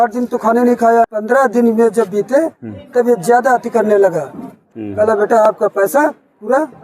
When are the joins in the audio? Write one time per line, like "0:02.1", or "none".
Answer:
0:01.1
0:04.7